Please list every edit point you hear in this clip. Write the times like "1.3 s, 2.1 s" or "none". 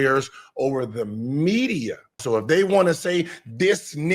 2.2 s